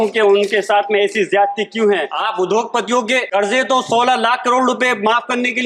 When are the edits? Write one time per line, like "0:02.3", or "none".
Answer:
0:02.2
0:03.3